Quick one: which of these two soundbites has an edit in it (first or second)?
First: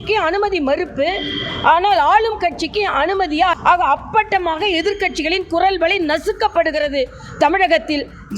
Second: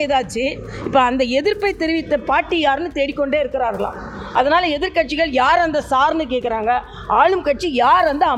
first